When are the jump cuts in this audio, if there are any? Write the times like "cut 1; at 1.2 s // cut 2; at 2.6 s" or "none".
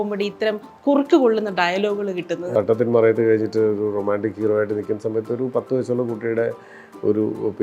cut 1; at 2.5 s